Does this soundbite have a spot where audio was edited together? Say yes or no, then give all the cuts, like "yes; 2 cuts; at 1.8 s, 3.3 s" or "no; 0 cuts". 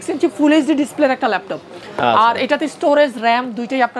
no; 0 cuts